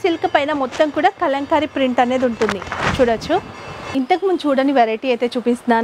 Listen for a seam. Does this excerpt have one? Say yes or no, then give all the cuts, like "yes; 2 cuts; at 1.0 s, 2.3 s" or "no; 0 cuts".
yes; 1 cut; at 3.9 s